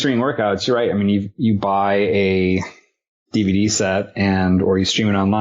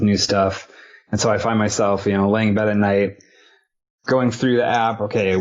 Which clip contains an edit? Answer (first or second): first